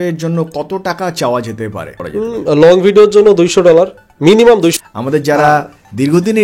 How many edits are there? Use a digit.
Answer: 2